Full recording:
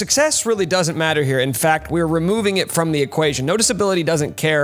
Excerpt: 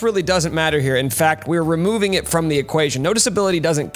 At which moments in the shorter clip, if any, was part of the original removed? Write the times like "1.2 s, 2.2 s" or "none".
none